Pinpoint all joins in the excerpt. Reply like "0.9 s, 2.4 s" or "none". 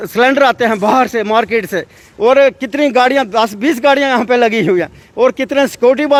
none